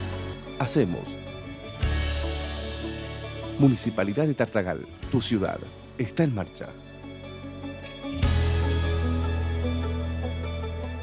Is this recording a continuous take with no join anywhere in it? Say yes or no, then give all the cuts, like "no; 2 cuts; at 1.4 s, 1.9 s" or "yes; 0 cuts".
yes; 0 cuts